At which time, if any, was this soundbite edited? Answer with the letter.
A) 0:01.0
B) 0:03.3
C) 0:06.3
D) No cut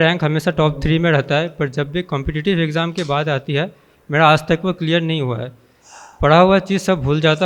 D